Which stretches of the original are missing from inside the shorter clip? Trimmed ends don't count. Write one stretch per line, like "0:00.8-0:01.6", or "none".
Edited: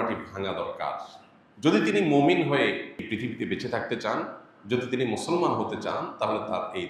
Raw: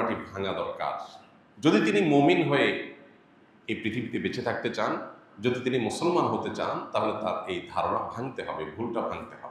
0:03.0-0:03.7